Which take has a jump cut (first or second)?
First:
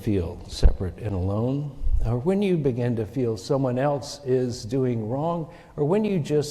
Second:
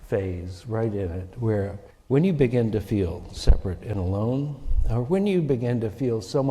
second